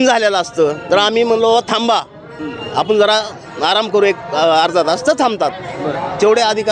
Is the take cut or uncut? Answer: uncut